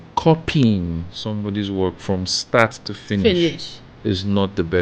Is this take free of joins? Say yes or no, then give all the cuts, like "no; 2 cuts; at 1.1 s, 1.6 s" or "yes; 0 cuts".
yes; 0 cuts